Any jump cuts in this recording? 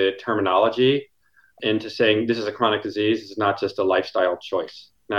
yes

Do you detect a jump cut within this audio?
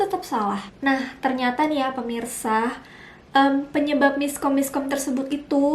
no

